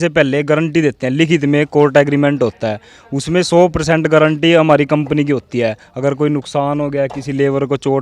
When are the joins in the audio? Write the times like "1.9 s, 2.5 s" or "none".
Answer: none